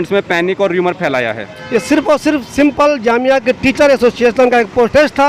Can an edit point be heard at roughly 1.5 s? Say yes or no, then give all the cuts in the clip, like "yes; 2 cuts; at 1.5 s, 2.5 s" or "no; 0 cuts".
yes; 1 cut; at 1.5 s